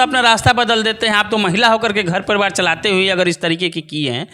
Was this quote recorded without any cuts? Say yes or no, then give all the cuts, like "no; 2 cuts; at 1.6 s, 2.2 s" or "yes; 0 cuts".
yes; 0 cuts